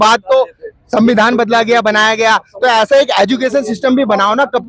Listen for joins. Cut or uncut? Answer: uncut